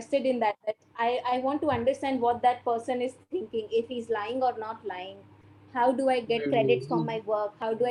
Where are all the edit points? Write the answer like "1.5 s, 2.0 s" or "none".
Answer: none